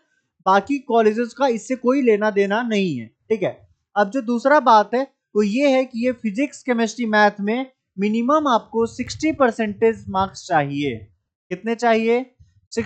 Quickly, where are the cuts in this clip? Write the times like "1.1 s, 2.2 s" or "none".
none